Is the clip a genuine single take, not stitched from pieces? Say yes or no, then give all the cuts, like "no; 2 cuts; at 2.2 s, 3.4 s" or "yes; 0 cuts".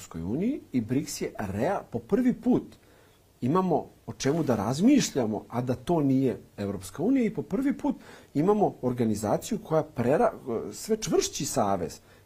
yes; 0 cuts